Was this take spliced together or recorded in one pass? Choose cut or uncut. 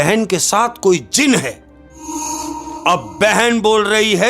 cut